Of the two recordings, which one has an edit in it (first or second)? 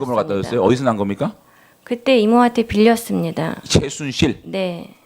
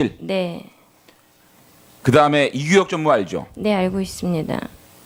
first